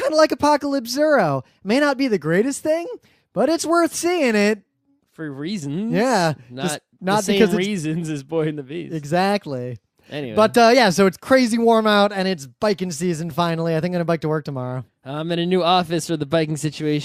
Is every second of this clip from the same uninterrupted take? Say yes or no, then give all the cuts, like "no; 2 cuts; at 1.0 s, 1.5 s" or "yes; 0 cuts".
no; 1 cut; at 2.6 s